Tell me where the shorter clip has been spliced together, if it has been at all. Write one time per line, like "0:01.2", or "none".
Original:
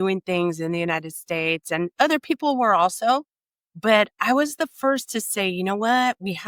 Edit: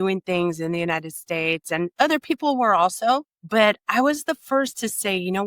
0:03.4